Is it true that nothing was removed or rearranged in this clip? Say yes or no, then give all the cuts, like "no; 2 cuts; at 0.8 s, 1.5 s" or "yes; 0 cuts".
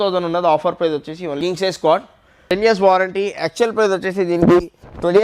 no; 2 cuts; at 1.4 s, 2.5 s